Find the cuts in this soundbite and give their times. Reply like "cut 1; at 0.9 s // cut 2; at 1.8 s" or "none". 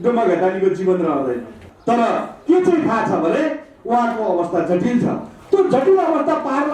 cut 1; at 1.7 s